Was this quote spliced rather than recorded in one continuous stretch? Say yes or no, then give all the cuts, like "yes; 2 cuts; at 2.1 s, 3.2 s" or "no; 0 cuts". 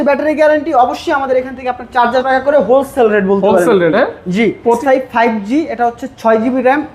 yes; 2 cuts; at 2.2 s, 4.8 s